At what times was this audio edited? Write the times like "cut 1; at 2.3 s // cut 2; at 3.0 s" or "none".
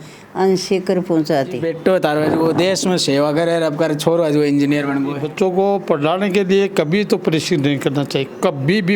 cut 1; at 1.7 s // cut 2; at 5.2 s